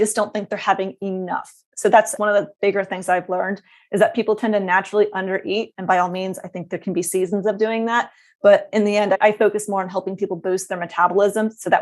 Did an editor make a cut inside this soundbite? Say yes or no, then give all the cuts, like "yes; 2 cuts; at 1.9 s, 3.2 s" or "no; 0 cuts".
no; 0 cuts